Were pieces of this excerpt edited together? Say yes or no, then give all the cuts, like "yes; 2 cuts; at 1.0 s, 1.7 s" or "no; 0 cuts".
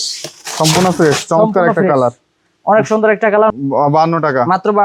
yes; 1 cut; at 3.5 s